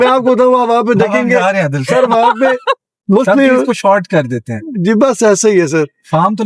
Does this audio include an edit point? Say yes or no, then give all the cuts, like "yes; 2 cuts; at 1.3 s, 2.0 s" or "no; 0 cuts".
yes; 1 cut; at 2.9 s